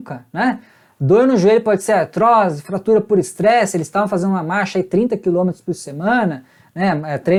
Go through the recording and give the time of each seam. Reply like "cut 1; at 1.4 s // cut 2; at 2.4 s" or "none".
none